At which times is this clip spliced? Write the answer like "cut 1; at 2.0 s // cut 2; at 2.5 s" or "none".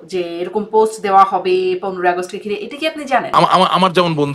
cut 1; at 3.3 s